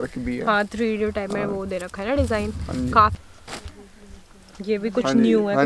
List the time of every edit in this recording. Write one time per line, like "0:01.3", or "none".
0:03.2